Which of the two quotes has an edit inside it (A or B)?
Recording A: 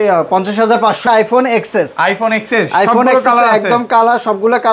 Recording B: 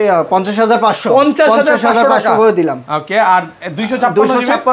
A